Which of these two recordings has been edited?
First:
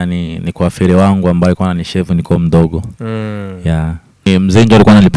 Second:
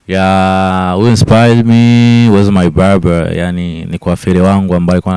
first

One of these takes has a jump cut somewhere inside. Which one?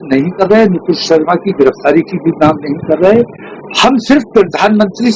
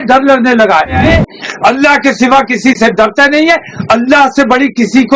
second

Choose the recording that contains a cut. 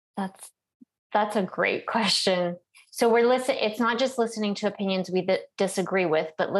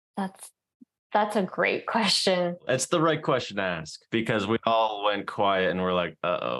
second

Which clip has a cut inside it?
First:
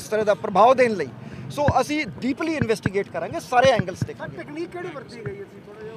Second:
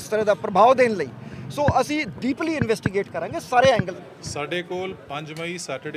second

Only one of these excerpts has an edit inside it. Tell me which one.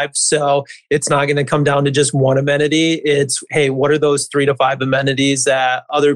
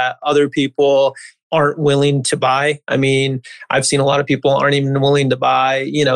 second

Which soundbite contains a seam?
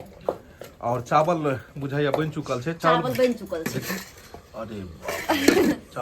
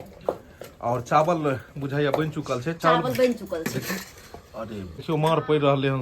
second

